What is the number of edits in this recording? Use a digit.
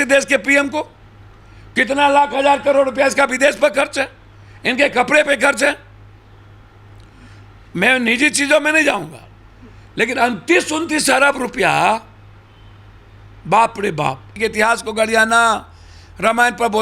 0